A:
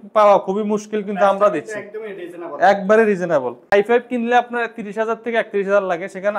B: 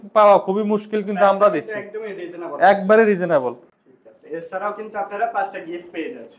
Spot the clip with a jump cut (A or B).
A